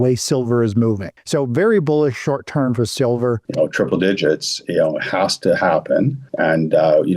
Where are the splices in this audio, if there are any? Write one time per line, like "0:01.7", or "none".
0:01.1
0:03.4
0:06.2